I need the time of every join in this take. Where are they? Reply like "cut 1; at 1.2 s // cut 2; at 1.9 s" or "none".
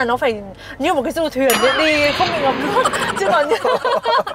none